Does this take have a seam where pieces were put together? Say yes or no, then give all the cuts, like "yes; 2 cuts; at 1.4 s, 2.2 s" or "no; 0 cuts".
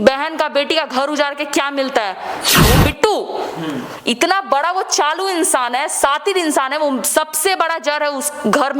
yes; 1 cut; at 2.5 s